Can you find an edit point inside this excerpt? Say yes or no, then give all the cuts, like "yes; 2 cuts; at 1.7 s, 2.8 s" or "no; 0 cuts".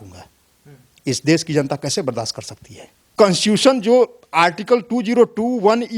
yes; 1 cut; at 3.1 s